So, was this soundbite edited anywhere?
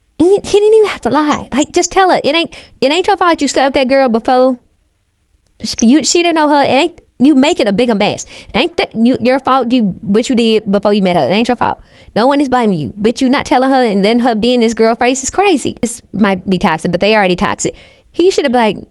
yes; 1 cut; at 15.8 s

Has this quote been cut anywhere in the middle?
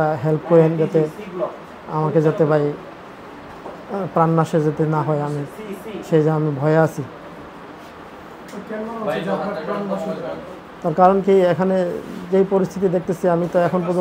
no; 0 cuts

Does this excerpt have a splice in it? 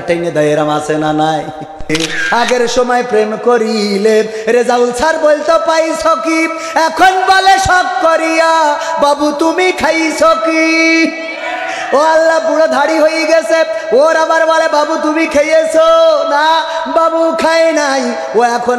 yes; 1 cut; at 1.9 s

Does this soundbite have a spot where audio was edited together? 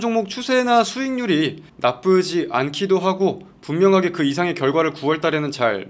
no; 0 cuts

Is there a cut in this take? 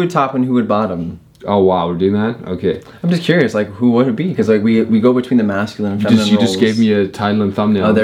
no; 0 cuts

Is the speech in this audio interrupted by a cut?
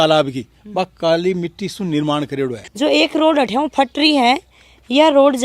yes; 1 cut; at 2.6 s

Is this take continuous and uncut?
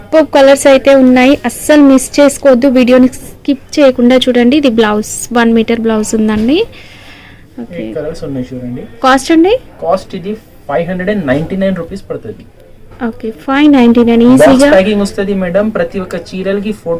yes; 0 cuts

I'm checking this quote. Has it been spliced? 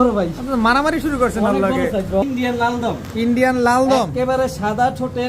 yes; 1 cut; at 2.2 s

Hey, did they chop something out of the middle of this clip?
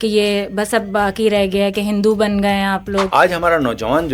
yes; 1 cut; at 3.1 s

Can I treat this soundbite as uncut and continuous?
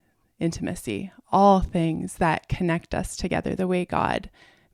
yes; 0 cuts

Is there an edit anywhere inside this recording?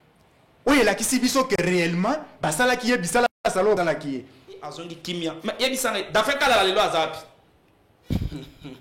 yes; 1 cut; at 4.9 s

